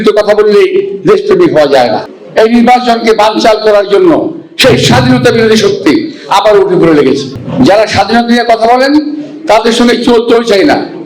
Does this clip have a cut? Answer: yes; 2 cuts; at 2.1 s, 7.4 s

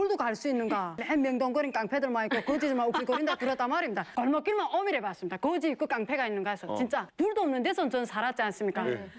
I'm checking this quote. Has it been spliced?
yes; 3 cuts; at 1.0 s, 4.1 s, 7.1 s

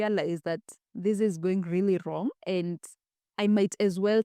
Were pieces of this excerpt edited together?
yes; 1 cut; at 2.4 s

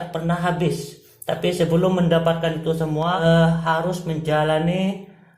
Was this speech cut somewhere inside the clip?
yes; 1 cut; at 3.2 s

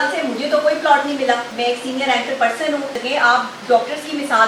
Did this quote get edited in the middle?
yes; 2 cuts; at 1.5 s, 3.0 s

